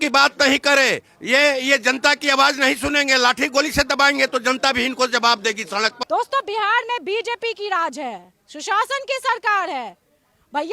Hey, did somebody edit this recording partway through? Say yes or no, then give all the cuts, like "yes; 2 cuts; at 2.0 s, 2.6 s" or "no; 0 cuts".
yes; 1 cut; at 6.0 s